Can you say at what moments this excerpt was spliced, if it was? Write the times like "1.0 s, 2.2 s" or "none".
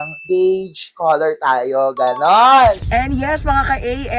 2.8 s